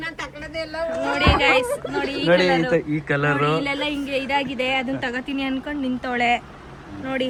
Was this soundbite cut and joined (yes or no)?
no